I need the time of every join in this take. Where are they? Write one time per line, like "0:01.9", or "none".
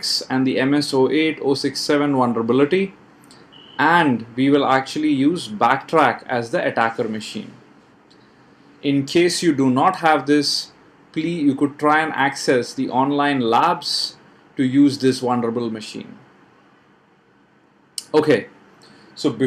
none

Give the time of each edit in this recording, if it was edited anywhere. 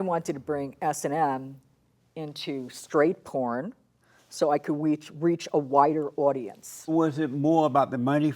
0:06.9

